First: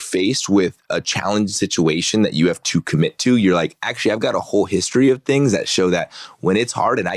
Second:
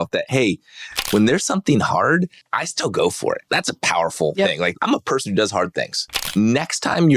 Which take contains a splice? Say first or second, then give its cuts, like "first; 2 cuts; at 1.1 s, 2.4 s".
second; 4 cuts; at 2.4 s, 3.4 s, 4.7 s, 6.2 s